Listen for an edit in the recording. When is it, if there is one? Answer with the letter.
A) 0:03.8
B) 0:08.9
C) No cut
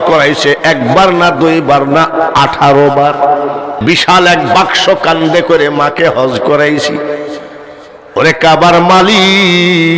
A